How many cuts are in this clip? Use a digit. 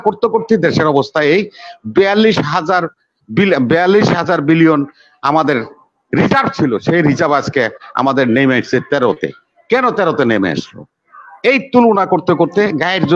0